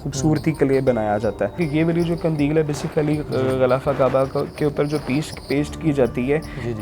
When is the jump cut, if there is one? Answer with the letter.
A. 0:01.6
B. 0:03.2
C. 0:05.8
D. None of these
A